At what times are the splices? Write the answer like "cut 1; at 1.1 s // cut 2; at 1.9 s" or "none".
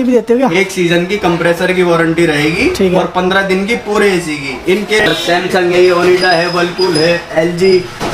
cut 1; at 5.1 s